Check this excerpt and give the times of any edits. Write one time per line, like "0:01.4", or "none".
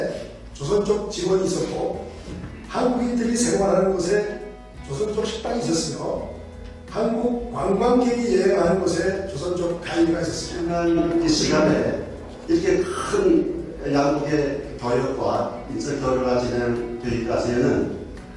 0:10.7